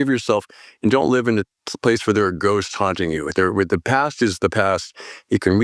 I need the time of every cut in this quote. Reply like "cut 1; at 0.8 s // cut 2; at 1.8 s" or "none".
none